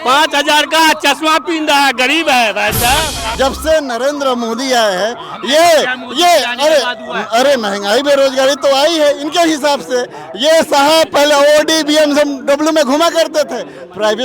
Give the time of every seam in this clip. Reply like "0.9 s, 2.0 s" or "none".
3.2 s